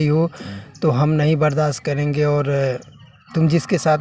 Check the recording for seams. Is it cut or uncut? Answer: uncut